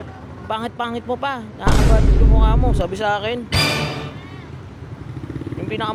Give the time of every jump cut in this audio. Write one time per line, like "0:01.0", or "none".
none